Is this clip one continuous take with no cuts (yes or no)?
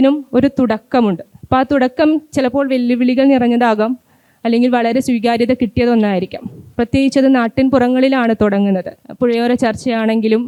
yes